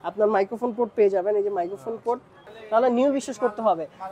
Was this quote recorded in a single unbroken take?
no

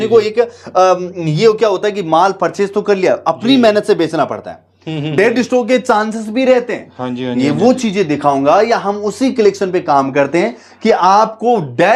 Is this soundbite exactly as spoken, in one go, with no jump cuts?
yes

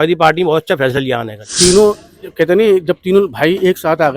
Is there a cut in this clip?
yes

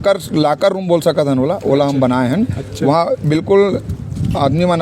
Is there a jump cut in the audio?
no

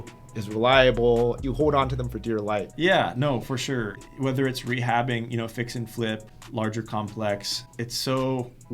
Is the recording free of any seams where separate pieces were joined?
no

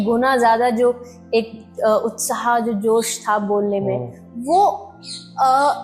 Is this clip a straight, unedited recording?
yes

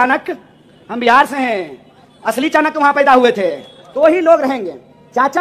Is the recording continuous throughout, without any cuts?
no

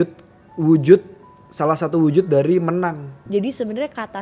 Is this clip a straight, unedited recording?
no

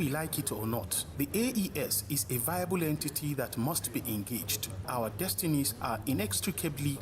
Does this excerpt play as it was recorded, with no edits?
no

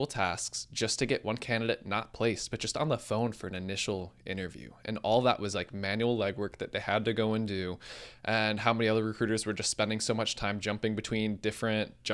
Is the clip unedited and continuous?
yes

